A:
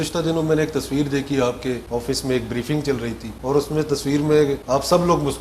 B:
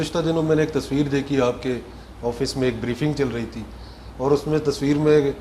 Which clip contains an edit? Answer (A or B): A